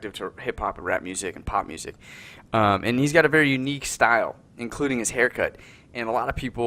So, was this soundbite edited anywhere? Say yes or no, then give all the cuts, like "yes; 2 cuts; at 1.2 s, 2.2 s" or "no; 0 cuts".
no; 0 cuts